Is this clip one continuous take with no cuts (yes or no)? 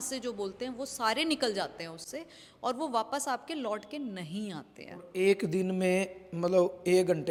yes